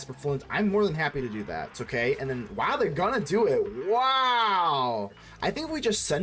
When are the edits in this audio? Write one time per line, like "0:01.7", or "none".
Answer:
0:01.8
0:05.3